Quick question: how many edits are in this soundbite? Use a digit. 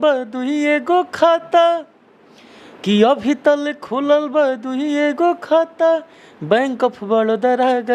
0